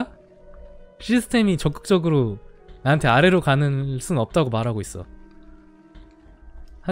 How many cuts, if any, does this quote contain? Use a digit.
0